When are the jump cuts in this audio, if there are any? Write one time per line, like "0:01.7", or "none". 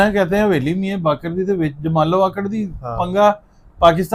none